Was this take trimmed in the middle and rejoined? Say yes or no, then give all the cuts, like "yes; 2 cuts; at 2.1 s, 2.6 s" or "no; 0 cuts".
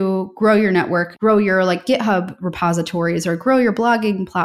yes; 1 cut; at 1.1 s